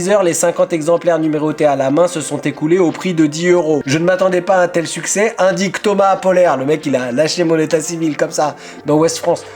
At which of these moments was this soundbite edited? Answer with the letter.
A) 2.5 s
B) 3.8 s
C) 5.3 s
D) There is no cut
B